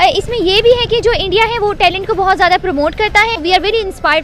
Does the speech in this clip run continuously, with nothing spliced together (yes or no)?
no